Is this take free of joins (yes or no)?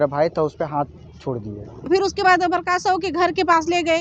no